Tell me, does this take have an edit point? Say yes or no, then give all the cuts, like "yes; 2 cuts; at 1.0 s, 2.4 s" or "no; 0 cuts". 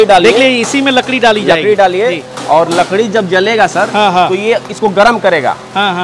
no; 0 cuts